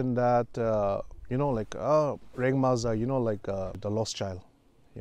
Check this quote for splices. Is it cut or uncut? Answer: cut